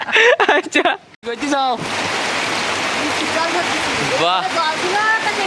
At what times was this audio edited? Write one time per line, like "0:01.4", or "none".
0:01.1